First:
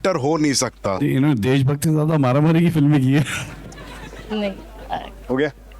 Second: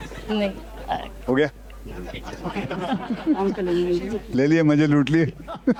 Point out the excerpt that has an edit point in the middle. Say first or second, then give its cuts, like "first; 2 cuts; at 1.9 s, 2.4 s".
first; 1 cut; at 1.0 s